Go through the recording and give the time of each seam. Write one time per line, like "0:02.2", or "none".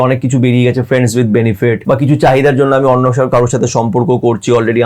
0:01.8